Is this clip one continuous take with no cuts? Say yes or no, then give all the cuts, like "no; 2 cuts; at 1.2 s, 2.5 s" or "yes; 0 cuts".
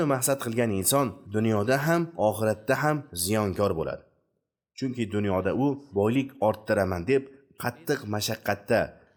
yes; 0 cuts